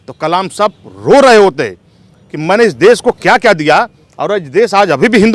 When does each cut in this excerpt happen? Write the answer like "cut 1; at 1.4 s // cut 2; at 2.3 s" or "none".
none